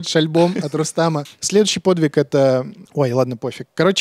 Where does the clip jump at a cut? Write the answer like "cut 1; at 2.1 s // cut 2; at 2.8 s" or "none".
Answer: cut 1; at 1.3 s // cut 2; at 2.8 s